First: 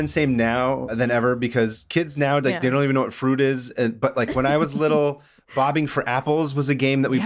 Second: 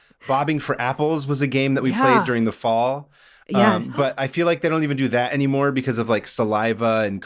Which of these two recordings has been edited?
first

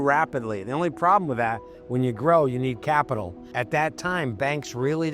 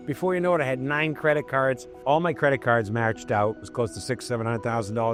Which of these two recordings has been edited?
first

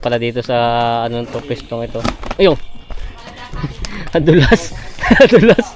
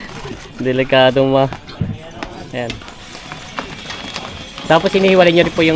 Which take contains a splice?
second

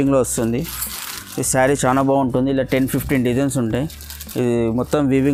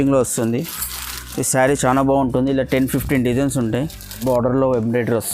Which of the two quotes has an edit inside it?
second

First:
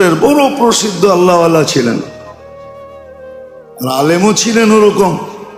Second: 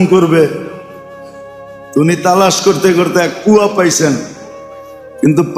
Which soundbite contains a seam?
first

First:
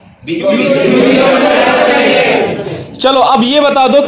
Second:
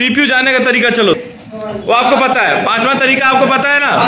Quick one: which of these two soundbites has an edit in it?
second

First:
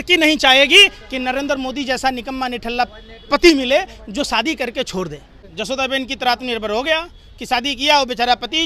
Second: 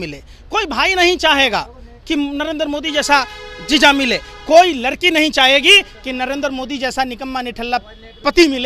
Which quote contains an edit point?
first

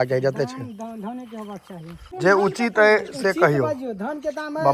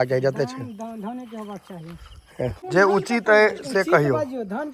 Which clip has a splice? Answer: first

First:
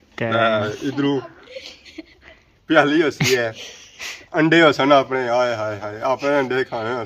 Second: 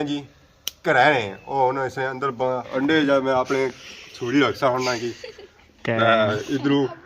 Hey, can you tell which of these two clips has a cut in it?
second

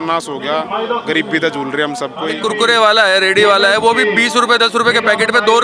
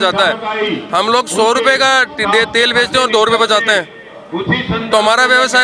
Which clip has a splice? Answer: first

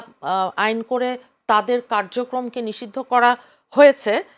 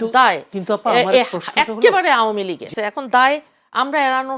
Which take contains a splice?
second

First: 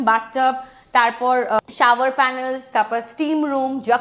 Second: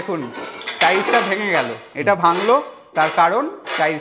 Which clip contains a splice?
first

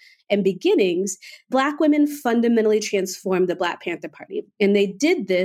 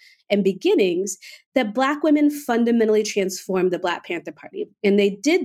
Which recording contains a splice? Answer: first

